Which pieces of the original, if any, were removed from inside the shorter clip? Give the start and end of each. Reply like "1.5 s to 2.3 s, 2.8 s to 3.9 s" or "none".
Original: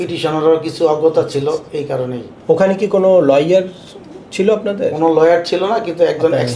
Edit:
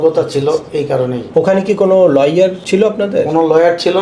2.2 s to 2.3 s, 3.7 s to 4.3 s